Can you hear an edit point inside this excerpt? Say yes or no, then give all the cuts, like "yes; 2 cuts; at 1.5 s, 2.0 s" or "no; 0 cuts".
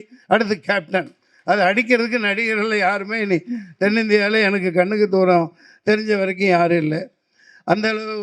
no; 0 cuts